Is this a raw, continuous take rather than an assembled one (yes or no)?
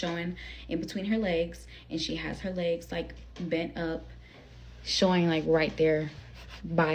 yes